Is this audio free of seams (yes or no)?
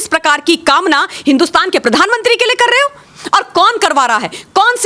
yes